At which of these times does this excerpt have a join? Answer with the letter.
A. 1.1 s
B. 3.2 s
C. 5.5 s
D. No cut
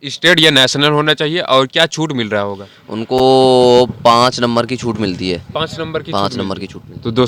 D